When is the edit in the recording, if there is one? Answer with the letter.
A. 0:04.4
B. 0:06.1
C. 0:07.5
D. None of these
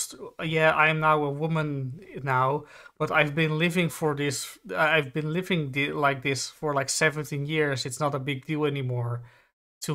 D